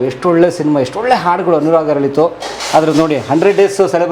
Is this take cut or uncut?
uncut